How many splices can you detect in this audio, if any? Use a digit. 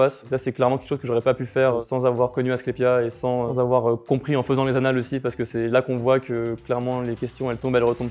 1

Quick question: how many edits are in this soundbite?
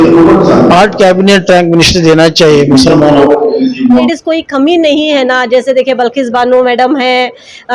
1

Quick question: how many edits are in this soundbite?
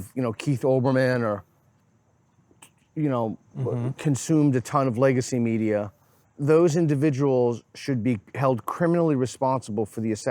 1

